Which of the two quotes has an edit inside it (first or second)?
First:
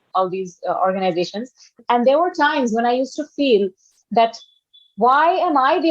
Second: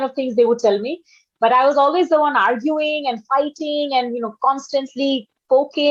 first